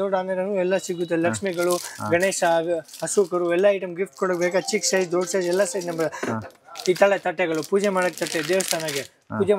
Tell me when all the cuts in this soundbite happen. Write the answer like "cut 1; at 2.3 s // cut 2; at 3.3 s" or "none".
none